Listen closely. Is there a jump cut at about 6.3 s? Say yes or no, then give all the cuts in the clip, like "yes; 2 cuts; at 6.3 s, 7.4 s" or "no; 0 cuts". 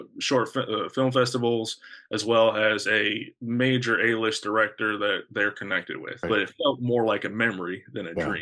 yes; 1 cut; at 6.3 s